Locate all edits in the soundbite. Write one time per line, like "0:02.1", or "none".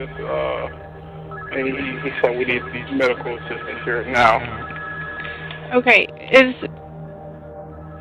none